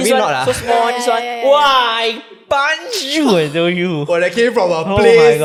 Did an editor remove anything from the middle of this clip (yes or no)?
no